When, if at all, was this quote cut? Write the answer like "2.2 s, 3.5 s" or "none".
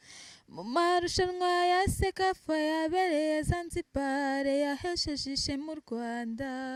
none